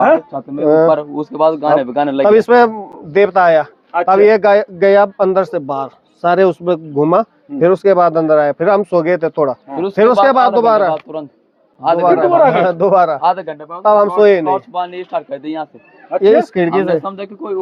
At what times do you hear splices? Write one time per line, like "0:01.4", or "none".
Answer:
none